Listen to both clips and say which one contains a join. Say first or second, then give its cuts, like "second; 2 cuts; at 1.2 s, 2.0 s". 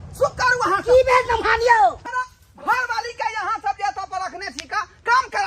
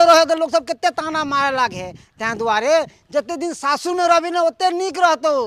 first; 1 cut; at 2.0 s